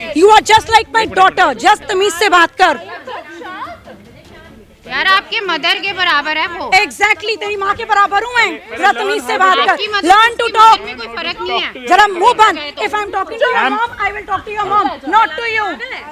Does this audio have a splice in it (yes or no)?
no